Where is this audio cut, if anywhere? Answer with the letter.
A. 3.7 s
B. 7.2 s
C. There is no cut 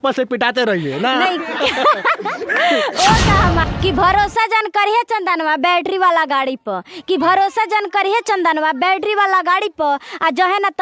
A